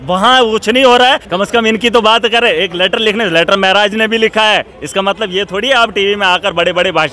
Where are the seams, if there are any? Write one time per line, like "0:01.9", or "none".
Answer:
0:01.2